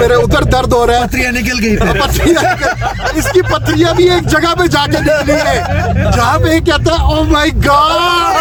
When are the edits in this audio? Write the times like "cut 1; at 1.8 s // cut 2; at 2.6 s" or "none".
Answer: none